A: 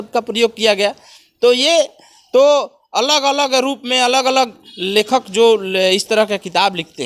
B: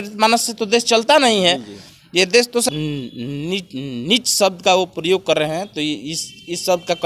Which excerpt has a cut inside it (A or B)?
B